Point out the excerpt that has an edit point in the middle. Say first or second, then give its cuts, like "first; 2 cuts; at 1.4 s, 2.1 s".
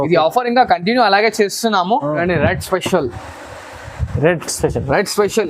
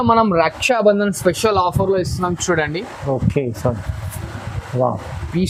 first; 1 cut; at 2.2 s